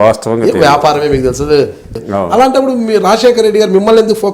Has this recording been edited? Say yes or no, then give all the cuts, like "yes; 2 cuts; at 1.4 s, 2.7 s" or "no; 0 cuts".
yes; 1 cut; at 2.0 s